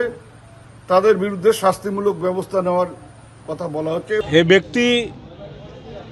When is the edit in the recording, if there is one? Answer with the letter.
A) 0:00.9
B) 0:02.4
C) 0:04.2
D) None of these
C